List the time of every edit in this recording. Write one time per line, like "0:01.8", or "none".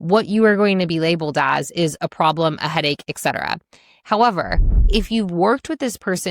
0:04.9